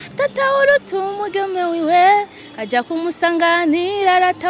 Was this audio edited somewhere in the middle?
no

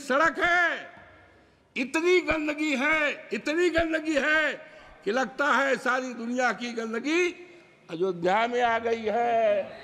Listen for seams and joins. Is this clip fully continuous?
yes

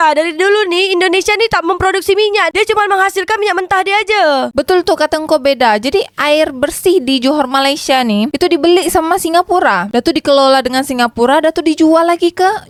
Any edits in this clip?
no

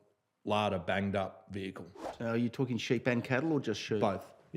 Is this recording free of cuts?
no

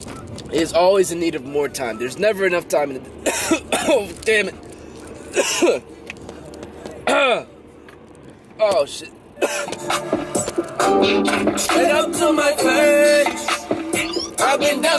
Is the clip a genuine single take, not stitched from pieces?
yes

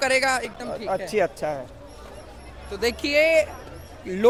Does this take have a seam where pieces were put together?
no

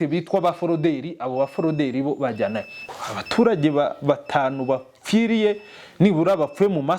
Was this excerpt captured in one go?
no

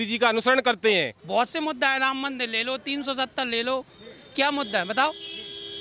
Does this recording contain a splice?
yes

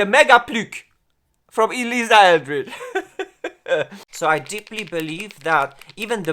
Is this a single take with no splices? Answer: no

